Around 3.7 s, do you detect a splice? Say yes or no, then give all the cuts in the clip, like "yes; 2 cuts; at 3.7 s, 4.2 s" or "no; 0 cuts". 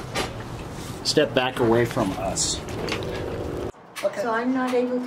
yes; 1 cut; at 3.7 s